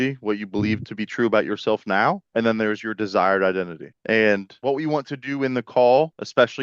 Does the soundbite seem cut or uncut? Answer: cut